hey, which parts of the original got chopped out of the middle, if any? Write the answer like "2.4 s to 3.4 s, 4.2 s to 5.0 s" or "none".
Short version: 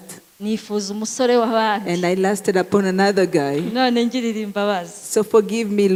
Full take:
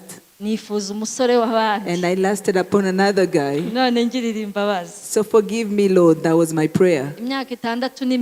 none